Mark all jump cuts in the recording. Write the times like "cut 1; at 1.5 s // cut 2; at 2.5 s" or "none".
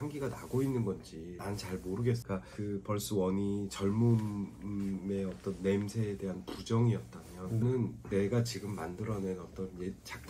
cut 1; at 1.3 s // cut 2; at 2.2 s